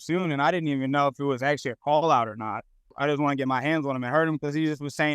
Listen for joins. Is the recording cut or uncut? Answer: cut